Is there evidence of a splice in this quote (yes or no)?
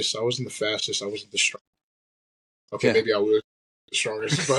no